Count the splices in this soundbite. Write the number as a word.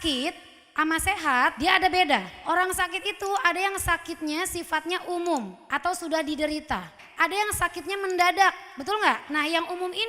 three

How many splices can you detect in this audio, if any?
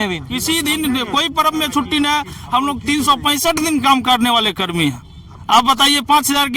zero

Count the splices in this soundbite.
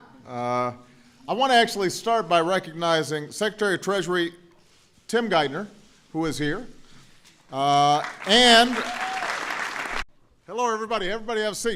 zero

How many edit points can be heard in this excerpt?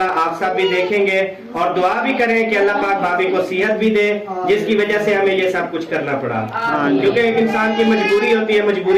zero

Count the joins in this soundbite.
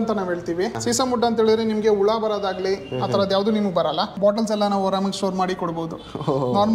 one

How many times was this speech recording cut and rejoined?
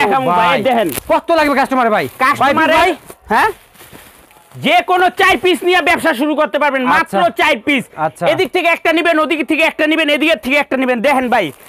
zero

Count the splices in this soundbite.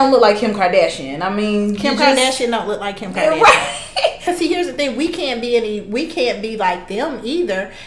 one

